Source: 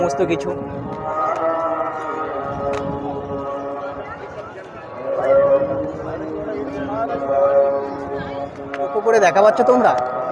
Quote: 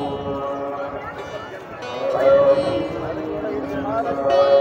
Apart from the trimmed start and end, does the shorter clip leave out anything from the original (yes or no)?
no